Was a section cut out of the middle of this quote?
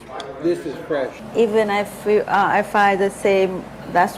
yes; 1 cut; at 1.2 s

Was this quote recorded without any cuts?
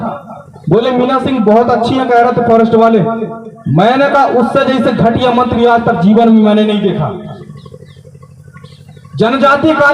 yes; 0 cuts

